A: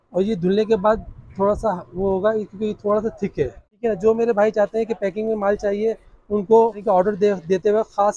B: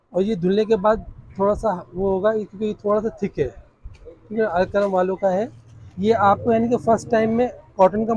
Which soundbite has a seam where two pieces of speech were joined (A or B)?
A